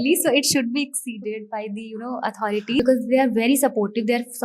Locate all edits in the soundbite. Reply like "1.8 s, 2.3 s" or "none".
2.8 s